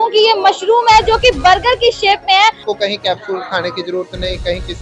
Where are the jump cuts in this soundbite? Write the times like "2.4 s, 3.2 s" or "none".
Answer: 2.7 s